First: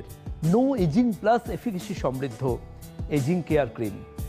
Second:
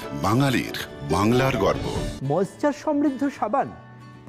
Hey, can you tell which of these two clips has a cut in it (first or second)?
second